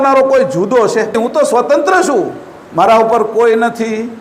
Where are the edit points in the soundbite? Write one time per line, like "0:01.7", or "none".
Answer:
0:01.1